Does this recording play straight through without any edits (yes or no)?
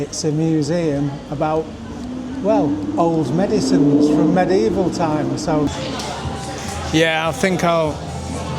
no